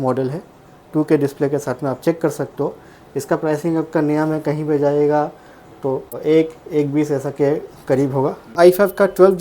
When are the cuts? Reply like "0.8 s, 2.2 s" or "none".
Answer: 6.1 s, 8.5 s